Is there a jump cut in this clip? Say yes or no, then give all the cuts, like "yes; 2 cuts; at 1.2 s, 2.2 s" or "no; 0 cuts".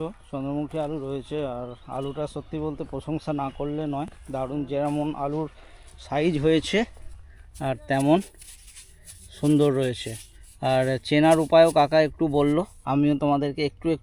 no; 0 cuts